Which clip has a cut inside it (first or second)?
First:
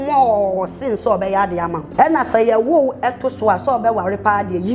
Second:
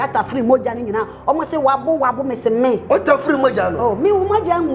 first